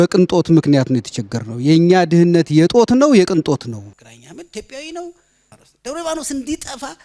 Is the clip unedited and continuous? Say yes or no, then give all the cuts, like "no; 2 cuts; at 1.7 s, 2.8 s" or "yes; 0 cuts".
no; 1 cut; at 3.8 s